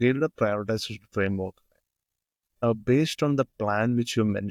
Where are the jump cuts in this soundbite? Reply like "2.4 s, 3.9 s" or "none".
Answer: none